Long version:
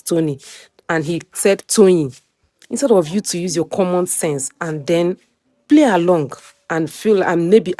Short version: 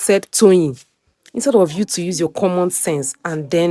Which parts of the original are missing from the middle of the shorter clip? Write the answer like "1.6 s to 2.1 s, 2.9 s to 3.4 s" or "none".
none